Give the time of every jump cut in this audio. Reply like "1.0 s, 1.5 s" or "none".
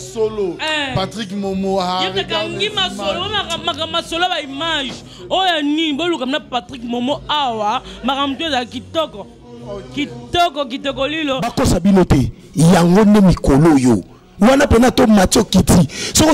none